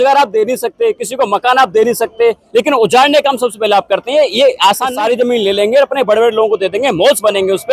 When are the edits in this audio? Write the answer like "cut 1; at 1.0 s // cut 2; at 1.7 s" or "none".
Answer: cut 1; at 4.9 s